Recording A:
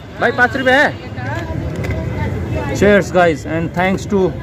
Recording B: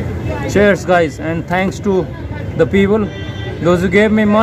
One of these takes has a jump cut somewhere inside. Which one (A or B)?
A